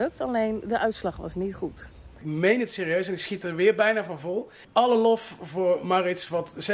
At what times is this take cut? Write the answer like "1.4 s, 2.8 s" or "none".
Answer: 2.2 s, 4.6 s